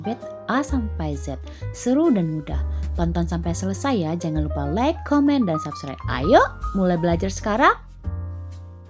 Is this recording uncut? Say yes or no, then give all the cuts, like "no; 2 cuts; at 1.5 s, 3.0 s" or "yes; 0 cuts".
yes; 0 cuts